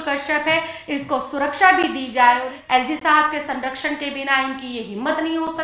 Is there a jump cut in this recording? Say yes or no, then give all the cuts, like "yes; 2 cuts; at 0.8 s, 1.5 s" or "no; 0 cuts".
yes; 1 cut; at 2.5 s